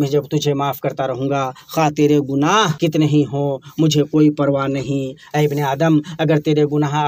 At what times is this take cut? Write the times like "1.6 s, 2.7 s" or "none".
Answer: 2.7 s